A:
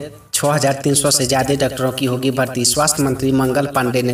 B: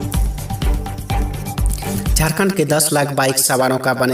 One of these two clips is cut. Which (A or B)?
B